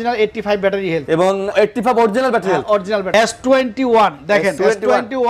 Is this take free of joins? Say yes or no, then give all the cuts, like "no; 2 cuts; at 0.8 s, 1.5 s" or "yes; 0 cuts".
no; 3 cuts; at 1.5 s, 3.1 s, 4.6 s